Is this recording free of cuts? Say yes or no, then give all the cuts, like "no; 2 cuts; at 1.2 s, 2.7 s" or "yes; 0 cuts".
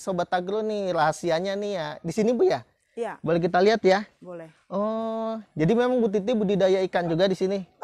yes; 0 cuts